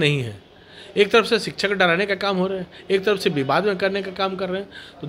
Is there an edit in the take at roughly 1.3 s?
no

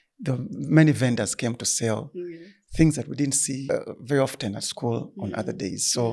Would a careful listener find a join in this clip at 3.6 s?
yes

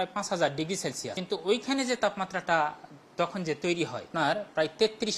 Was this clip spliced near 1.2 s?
yes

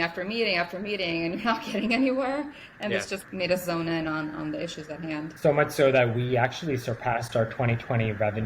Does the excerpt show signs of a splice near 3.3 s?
yes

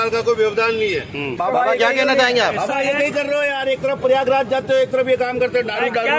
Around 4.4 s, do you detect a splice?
no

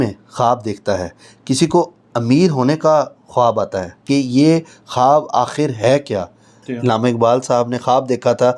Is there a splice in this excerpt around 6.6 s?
yes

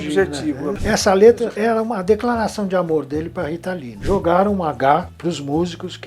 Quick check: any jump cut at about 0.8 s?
yes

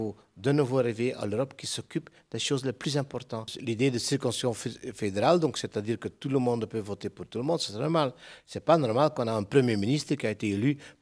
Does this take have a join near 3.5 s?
yes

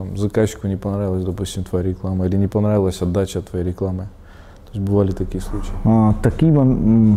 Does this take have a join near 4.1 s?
no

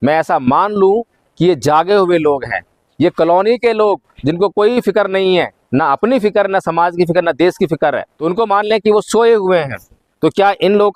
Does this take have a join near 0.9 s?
no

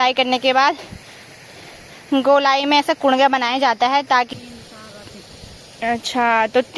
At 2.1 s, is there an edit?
no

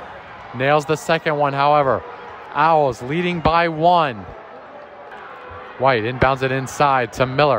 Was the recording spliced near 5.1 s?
yes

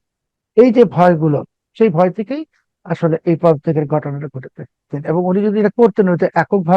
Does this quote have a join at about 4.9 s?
yes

